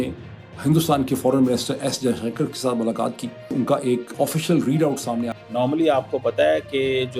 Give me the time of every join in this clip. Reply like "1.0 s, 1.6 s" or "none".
3.5 s, 5.3 s